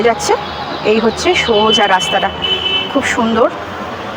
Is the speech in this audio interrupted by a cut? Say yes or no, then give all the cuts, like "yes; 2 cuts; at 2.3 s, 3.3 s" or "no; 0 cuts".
no; 0 cuts